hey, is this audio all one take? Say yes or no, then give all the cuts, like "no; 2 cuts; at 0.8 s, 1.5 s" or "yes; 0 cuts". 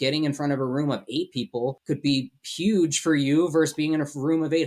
no; 1 cut; at 1.8 s